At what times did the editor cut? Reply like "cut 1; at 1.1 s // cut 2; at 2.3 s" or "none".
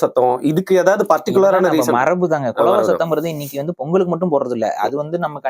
none